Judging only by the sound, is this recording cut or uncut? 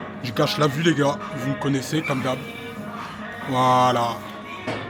uncut